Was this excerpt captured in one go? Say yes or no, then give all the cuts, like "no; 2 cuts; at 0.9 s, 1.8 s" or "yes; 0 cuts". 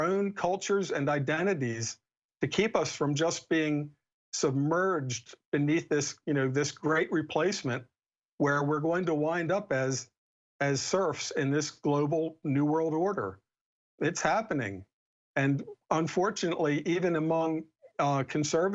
yes; 0 cuts